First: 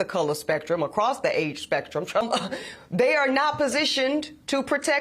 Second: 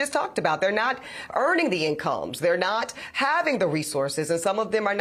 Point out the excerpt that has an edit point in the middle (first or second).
first